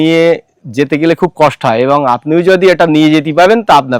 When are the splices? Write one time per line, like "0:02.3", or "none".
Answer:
none